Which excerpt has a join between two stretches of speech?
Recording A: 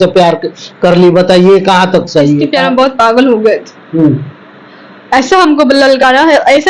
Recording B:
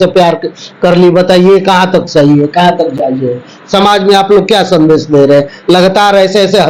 A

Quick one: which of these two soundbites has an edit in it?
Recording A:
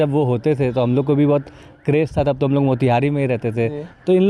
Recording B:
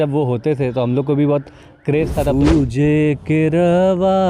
B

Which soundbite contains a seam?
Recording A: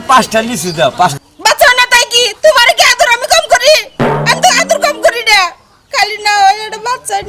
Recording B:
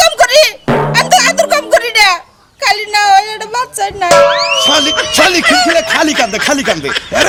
A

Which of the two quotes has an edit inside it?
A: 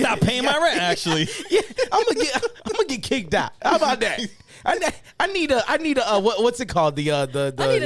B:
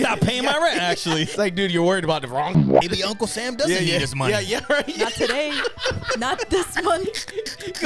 B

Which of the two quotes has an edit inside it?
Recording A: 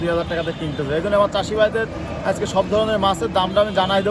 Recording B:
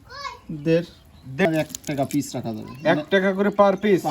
B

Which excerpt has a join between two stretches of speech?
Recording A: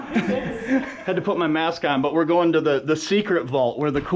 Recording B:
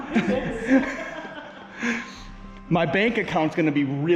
A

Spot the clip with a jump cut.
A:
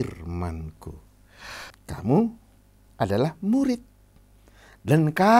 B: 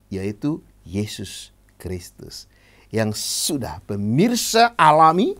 A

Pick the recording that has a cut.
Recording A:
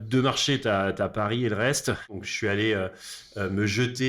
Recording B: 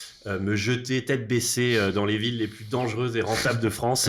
A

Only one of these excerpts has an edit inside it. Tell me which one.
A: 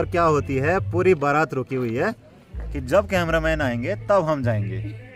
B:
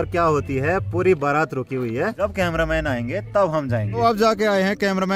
B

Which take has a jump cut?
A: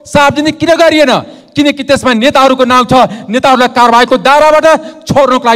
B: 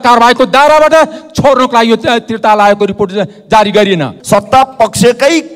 B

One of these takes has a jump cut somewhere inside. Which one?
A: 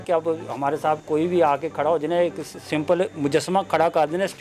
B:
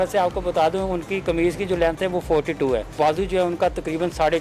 B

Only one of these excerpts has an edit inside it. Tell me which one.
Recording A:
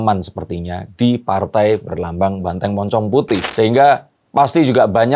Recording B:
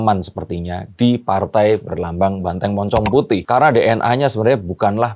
A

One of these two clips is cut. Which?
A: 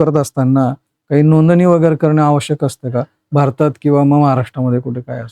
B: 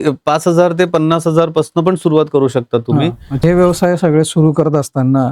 B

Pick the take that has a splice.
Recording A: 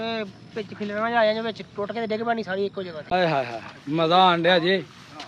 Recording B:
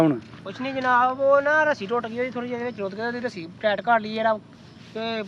A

